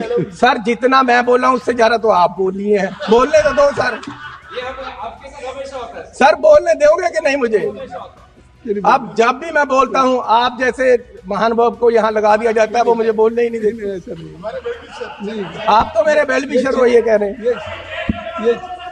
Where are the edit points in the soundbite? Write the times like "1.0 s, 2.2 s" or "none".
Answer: none